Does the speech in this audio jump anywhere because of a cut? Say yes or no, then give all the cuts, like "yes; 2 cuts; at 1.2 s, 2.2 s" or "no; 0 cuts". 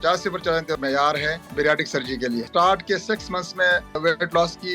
yes; 3 cuts; at 0.9 s, 2.5 s, 4.0 s